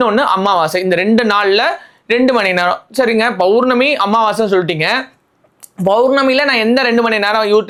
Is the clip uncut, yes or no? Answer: yes